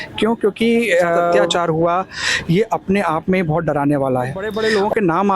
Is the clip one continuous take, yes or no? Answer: no